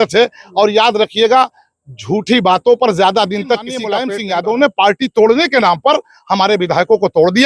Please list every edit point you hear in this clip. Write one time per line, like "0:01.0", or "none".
0:03.9